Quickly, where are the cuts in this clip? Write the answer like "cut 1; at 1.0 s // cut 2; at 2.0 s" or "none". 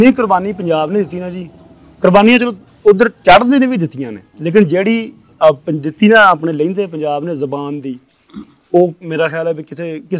none